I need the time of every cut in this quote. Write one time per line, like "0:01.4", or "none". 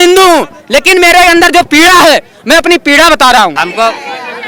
0:03.6